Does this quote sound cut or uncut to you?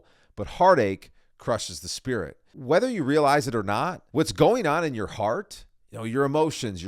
cut